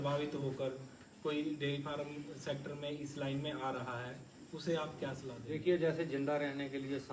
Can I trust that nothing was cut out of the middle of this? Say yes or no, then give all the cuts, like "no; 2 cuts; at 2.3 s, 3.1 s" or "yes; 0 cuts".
no; 1 cut; at 5.4 s